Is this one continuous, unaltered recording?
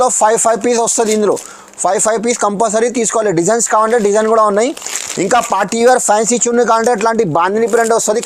yes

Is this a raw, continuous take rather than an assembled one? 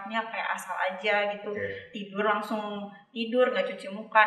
yes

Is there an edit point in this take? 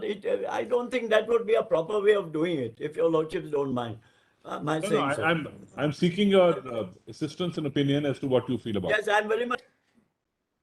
yes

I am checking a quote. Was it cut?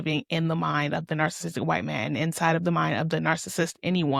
no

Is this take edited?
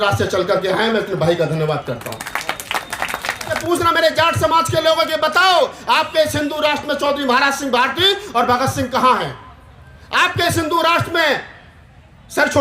yes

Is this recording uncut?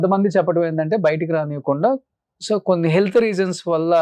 yes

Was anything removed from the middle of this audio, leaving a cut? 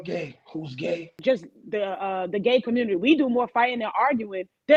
yes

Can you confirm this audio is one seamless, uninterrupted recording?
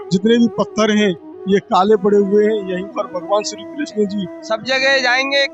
no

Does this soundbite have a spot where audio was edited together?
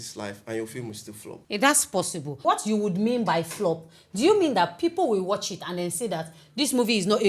yes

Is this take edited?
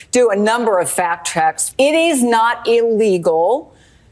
yes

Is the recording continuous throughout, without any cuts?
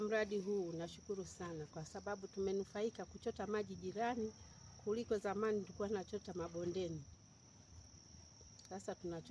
yes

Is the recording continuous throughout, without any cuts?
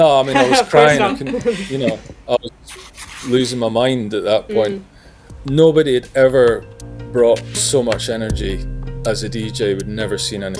yes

